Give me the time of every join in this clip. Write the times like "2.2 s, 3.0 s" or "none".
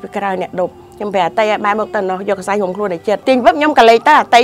3.2 s